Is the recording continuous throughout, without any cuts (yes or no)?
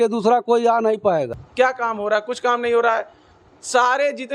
no